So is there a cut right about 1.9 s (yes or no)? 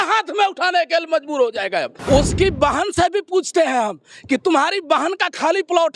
yes